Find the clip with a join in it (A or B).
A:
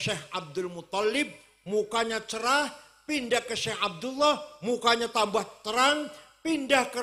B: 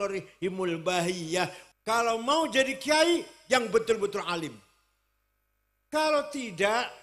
B